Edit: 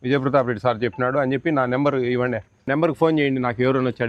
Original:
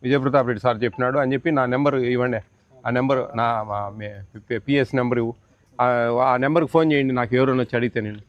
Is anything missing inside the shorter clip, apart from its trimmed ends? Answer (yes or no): yes